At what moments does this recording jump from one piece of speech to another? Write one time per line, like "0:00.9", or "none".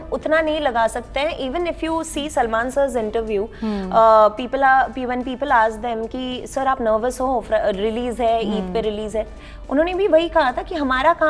none